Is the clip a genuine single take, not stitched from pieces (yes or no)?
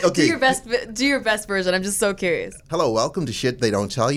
no